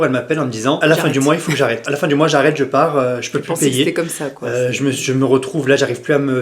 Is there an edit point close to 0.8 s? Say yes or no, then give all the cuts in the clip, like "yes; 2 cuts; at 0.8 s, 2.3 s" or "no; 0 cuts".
yes; 2 cuts; at 0.8 s, 1.8 s